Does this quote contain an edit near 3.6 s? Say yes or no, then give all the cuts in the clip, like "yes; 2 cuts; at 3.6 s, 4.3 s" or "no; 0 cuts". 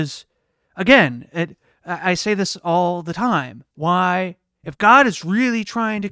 yes; 1 cut; at 3.6 s